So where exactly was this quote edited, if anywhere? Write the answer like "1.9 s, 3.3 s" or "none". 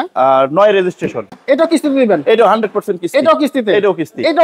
1.3 s